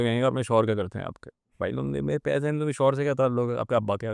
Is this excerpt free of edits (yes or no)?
yes